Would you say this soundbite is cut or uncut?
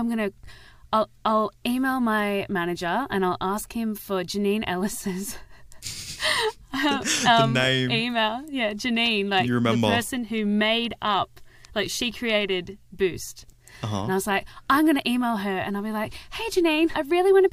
uncut